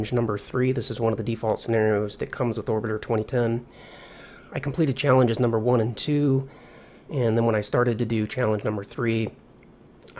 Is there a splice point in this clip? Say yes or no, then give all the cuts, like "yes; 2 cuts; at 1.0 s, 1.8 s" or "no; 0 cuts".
no; 0 cuts